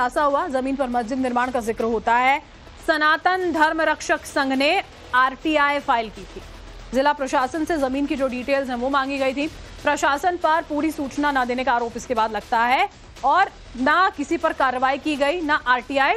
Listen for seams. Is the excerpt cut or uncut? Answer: uncut